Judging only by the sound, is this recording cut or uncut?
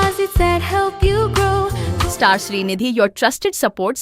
cut